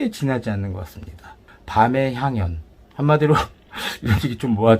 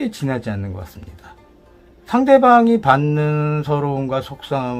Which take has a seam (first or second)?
first